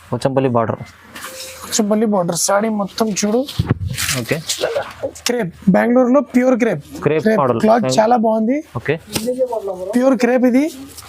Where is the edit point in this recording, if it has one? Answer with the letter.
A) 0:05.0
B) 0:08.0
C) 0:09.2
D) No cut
A